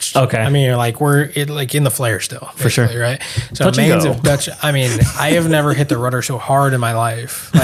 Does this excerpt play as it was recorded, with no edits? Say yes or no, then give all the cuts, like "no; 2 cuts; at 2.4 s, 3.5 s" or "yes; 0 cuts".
yes; 0 cuts